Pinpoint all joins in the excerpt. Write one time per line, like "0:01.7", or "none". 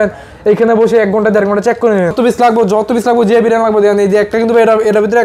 0:02.1